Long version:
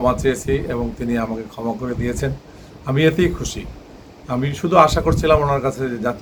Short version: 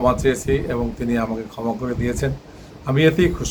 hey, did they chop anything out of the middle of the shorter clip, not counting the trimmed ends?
no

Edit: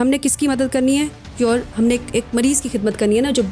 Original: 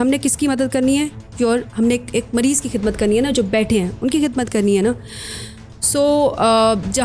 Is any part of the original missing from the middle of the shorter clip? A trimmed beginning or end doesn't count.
no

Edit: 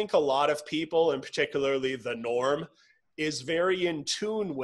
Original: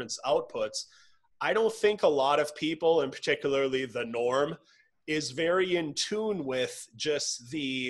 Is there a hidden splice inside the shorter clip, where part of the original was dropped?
no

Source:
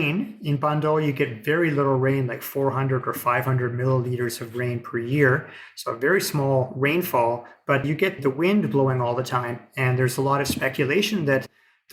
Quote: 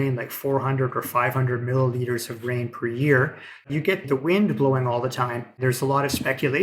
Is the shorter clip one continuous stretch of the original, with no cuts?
no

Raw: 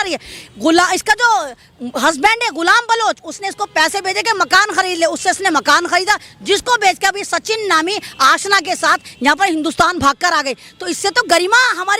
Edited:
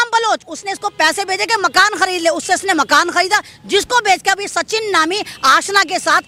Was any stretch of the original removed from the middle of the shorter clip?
no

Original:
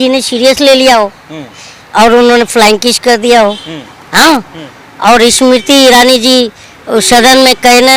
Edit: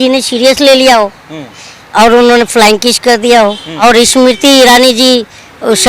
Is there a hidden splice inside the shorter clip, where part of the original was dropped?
yes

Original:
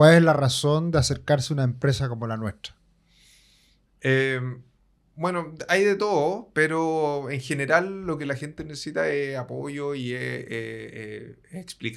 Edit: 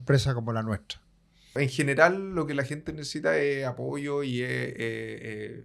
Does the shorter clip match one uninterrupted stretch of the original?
no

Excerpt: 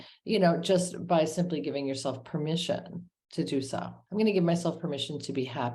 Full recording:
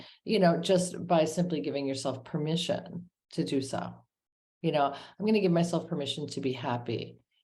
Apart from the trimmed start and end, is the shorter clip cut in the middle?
yes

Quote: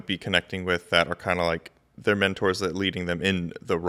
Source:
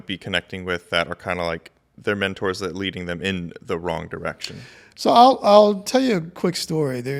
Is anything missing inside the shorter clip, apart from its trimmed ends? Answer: no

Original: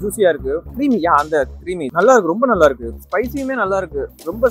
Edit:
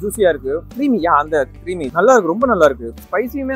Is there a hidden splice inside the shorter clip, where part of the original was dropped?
no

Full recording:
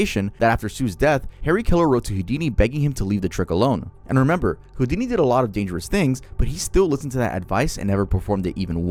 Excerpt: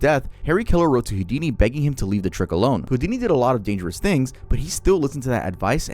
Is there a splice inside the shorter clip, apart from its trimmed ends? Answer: yes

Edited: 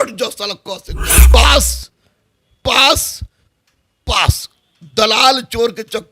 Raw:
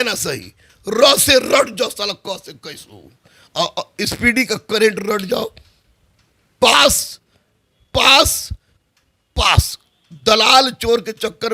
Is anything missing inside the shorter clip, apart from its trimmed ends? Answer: yes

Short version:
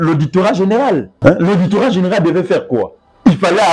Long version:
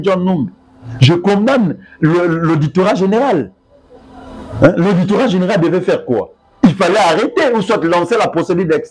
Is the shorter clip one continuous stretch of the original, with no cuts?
no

